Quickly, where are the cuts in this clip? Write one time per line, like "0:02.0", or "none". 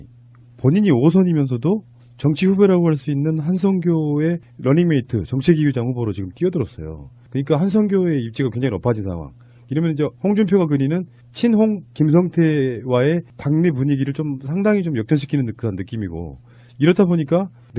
none